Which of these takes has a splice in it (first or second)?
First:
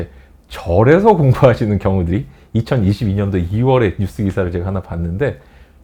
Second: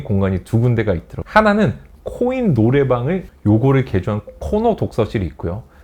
second